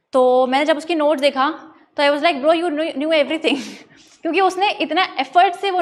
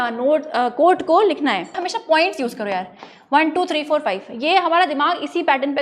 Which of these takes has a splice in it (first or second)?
second